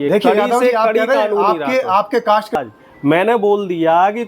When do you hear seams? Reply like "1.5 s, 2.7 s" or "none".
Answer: 2.6 s